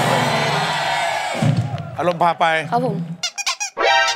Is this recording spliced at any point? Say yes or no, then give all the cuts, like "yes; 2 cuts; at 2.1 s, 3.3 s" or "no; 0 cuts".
yes; 1 cut; at 3.2 s